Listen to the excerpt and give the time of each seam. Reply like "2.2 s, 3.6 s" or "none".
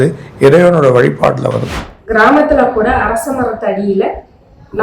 1.7 s